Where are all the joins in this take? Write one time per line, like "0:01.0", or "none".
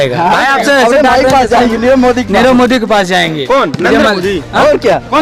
none